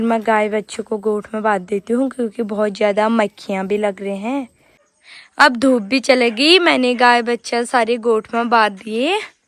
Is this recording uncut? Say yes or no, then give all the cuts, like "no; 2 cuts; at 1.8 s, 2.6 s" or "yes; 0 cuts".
yes; 0 cuts